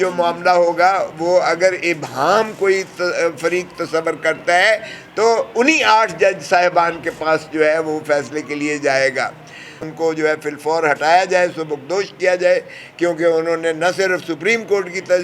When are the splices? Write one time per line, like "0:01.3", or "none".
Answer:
0:09.8